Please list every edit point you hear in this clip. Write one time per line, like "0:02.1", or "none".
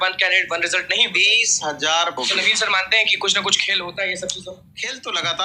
0:02.2